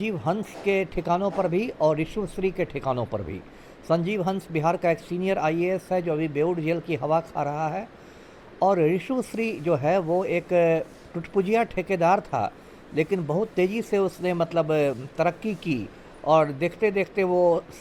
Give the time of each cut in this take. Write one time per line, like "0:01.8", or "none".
none